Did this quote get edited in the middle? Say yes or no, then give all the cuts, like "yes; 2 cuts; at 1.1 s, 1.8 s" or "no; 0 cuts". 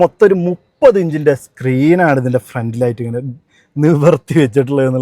no; 0 cuts